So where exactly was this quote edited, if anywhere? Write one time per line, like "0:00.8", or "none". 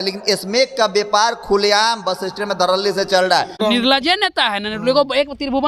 0:03.6